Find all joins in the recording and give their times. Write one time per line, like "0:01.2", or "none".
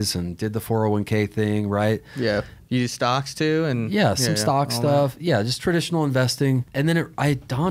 0:02.6
0:06.7